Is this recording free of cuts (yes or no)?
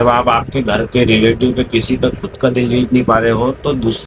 yes